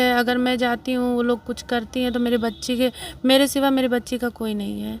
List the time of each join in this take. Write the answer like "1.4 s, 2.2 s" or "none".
none

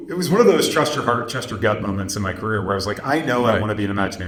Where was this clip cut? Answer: none

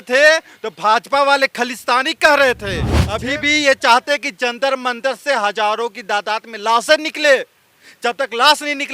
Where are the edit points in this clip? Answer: 3.0 s

